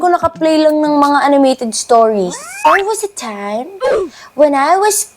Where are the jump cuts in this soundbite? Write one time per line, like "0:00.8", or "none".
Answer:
0:02.6